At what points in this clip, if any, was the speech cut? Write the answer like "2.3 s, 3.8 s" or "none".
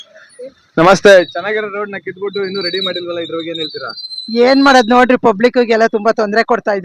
none